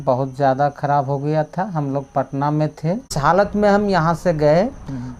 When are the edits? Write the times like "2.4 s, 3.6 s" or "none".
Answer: 3.2 s